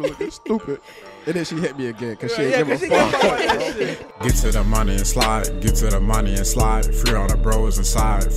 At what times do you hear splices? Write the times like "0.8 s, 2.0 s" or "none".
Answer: 4.0 s